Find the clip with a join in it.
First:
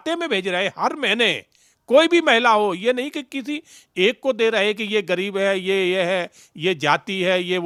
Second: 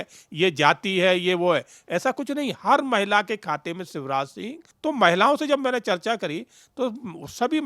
second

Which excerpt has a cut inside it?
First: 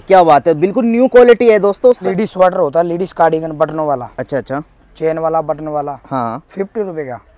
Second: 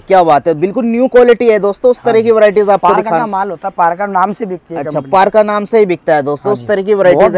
first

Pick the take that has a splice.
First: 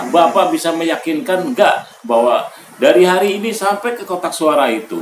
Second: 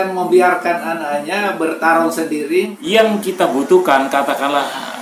second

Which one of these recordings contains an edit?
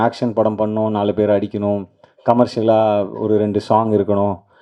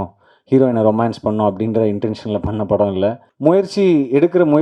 second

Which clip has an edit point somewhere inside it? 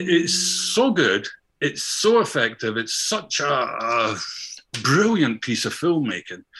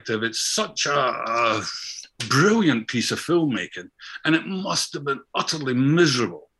first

